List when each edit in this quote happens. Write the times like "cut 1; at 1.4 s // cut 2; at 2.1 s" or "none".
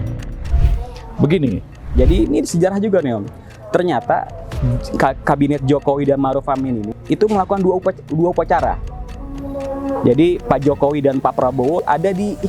cut 1; at 1.9 s